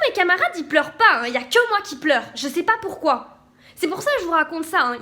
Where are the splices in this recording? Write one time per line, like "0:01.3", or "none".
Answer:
none